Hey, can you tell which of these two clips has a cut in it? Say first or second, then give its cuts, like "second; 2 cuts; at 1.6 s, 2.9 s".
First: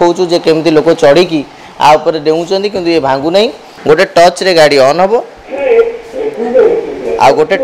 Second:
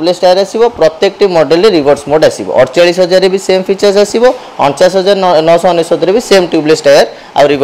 first; 1 cut; at 3.7 s